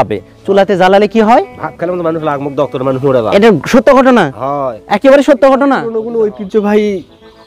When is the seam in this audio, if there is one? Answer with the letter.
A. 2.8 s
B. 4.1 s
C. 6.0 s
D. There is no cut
C